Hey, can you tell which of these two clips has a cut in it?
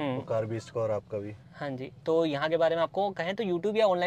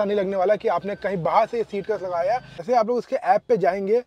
second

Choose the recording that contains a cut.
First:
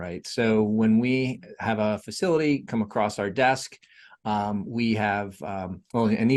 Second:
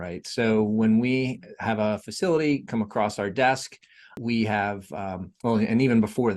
second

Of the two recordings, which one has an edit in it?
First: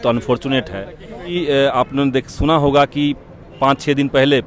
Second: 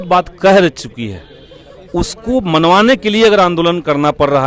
first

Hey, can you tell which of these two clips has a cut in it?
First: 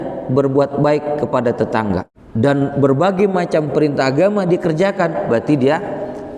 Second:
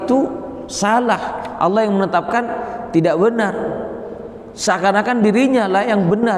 first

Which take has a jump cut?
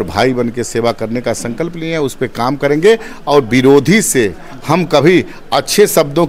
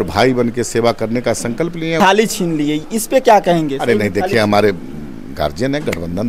second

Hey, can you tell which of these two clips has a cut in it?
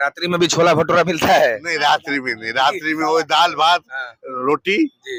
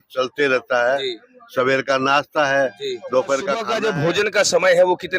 second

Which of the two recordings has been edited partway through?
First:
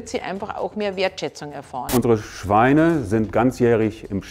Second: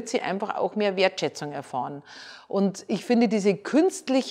first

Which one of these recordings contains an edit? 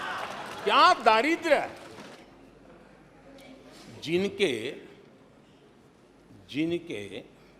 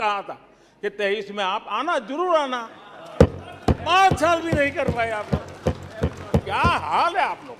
first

